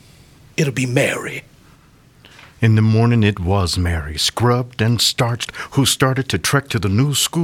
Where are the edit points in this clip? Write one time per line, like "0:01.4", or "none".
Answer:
none